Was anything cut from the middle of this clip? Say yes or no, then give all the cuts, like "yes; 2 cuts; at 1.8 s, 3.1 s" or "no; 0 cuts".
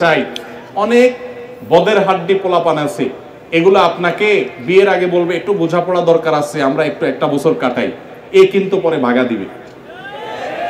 no; 0 cuts